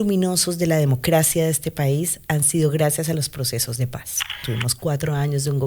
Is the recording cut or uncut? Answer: cut